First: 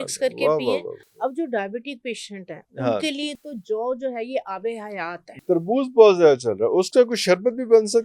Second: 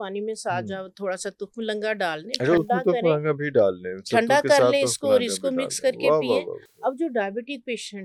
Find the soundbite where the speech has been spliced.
first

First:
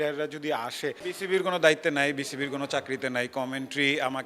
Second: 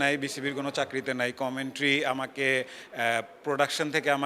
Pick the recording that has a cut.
first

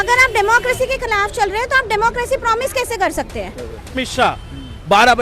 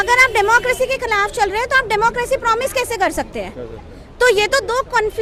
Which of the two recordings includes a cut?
first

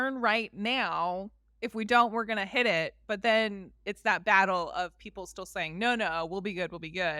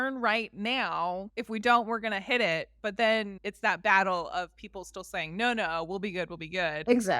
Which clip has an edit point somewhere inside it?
second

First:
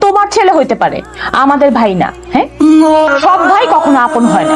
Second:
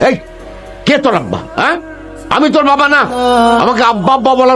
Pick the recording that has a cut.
first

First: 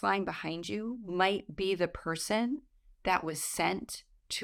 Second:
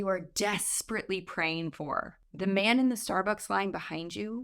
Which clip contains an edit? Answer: second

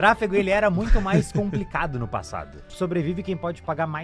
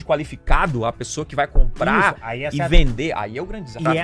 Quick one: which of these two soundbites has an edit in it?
first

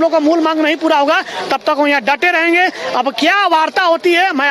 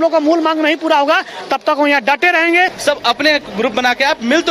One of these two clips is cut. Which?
second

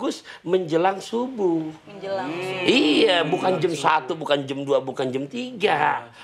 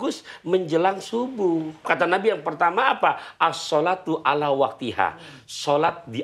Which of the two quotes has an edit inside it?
second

